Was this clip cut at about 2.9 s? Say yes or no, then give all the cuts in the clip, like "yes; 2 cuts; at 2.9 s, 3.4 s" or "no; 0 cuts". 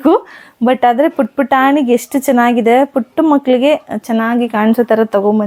no; 0 cuts